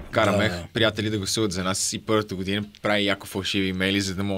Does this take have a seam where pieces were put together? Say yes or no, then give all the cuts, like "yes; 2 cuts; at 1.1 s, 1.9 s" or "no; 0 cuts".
no; 0 cuts